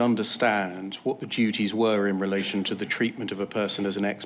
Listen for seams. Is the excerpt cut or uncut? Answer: uncut